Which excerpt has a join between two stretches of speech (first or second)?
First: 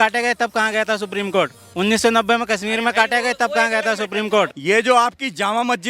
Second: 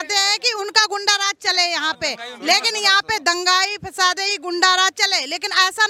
first